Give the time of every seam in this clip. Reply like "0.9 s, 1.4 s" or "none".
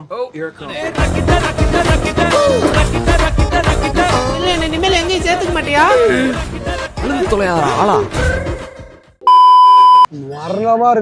10.1 s